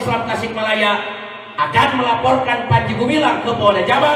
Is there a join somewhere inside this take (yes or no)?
no